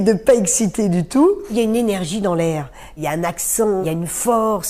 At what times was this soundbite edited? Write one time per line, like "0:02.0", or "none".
0:01.5
0:02.9
0:03.8